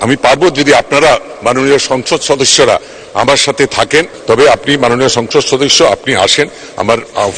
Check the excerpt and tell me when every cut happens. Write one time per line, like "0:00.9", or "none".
0:04.1